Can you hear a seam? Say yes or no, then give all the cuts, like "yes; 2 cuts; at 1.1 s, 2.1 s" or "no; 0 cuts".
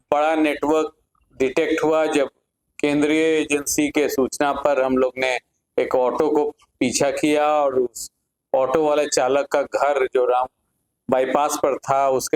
no; 0 cuts